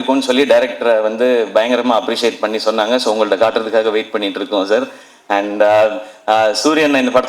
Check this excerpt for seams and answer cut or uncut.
uncut